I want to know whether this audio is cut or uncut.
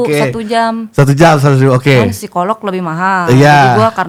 uncut